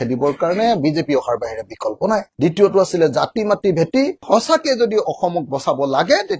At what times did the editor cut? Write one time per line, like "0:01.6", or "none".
none